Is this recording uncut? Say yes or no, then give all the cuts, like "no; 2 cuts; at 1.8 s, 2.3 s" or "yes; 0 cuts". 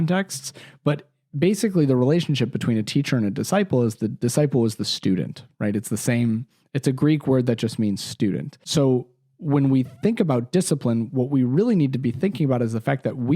no; 1 cut; at 8.6 s